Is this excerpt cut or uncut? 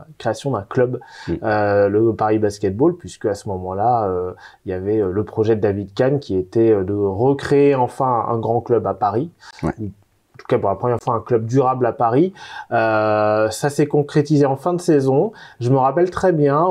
uncut